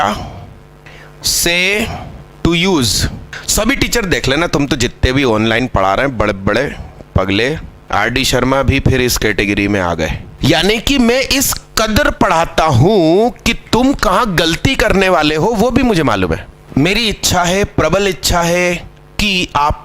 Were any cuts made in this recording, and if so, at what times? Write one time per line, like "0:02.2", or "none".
0:07.8
0:10.3
0:16.5